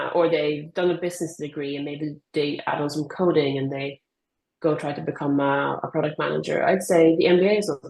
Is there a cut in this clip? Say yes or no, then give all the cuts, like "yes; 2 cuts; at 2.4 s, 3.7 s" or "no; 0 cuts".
no; 0 cuts